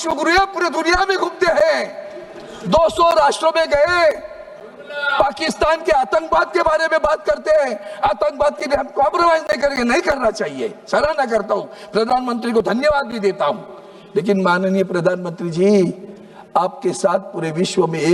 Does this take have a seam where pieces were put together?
no; 0 cuts

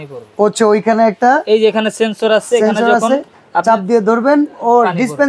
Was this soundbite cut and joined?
no; 0 cuts

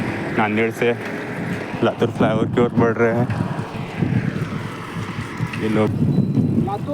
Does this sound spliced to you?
yes; 1 cut; at 5.9 s

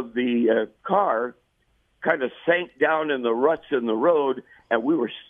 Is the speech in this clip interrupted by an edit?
no; 0 cuts

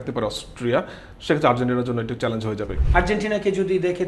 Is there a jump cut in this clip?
yes; 1 cut; at 2.8 s

